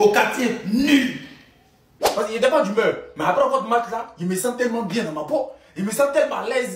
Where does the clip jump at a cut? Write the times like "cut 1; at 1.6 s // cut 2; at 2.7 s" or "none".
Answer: cut 1; at 2.0 s